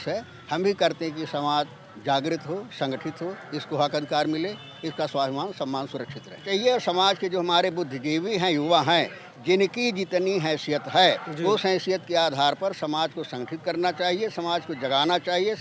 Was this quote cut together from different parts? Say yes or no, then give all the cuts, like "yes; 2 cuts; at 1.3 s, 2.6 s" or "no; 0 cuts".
yes; 1 cut; at 6.5 s